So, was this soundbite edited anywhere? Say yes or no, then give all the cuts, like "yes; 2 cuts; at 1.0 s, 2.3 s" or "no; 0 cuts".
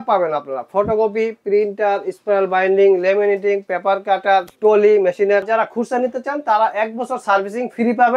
yes; 1 cut; at 5.5 s